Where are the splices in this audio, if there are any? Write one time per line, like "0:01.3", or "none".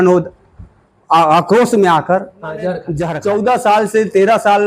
0:02.9